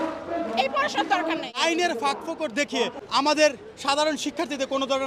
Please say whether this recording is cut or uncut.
cut